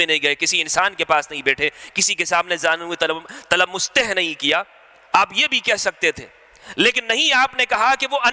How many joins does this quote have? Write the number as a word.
zero